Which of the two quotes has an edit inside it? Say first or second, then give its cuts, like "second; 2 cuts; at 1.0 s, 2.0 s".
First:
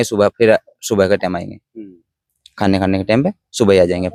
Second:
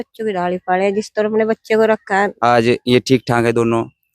second; 1 cut; at 2.3 s